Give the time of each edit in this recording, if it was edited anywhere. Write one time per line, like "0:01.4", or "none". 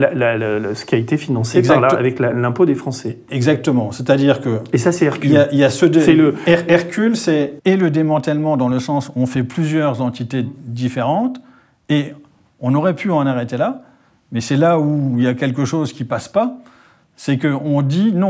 none